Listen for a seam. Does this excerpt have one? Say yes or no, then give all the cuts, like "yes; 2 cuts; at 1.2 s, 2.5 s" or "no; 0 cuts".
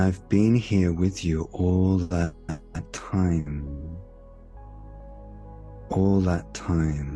yes; 2 cuts; at 4.5 s, 5.9 s